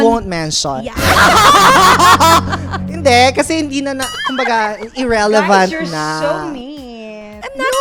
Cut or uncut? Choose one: uncut